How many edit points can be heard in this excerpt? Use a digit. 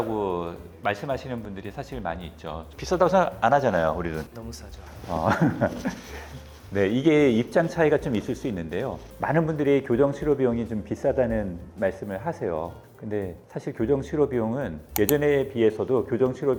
0